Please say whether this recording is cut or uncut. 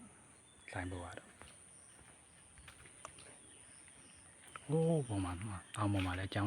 uncut